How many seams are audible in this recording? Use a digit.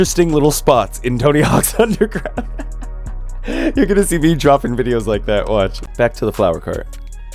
1